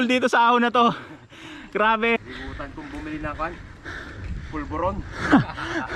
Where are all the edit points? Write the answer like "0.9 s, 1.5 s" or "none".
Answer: 2.2 s

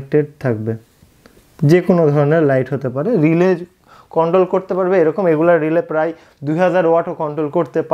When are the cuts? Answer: none

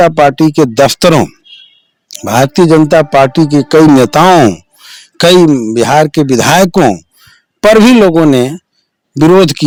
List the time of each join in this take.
none

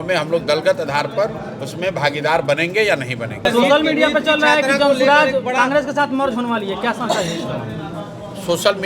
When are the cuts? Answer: 3.4 s

